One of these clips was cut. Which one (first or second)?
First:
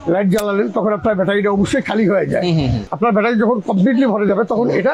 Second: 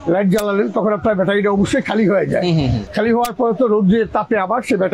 first